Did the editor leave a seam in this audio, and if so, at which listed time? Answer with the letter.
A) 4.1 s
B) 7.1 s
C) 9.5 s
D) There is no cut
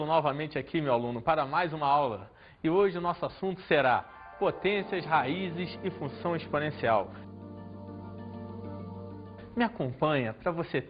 D